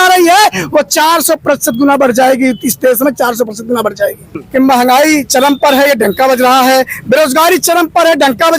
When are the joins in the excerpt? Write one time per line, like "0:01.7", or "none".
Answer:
0:04.4

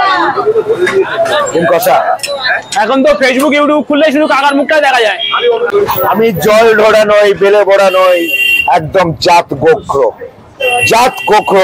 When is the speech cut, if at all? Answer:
0:05.7

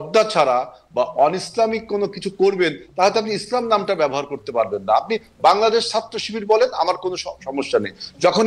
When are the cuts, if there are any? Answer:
none

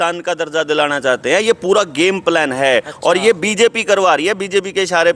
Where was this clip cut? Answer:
none

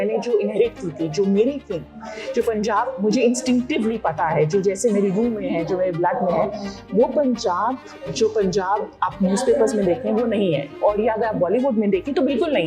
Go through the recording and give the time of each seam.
none

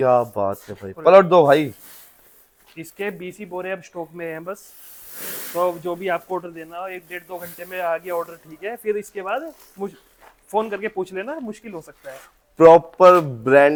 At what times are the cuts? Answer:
none

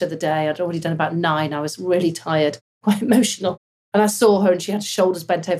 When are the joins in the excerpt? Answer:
none

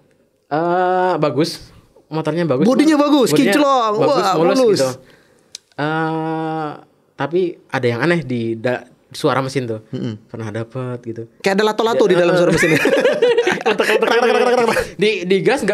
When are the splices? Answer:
none

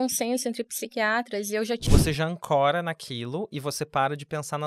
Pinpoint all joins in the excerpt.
0:01.9

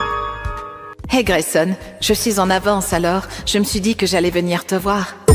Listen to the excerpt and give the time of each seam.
none

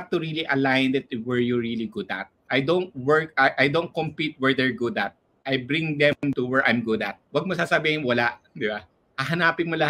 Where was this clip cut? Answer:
0:02.3
0:07.2

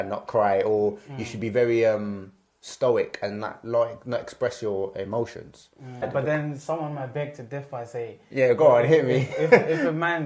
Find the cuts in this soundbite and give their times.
0:06.0

